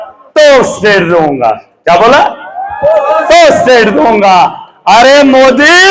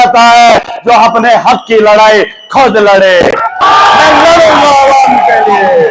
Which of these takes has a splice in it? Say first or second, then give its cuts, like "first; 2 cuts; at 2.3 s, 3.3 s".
second; 1 cut; at 3.9 s